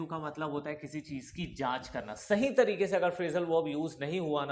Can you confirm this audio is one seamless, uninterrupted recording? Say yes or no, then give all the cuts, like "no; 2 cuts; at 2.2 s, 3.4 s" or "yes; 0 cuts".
yes; 0 cuts